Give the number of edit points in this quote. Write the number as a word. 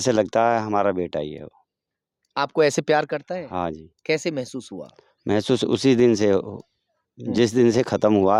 zero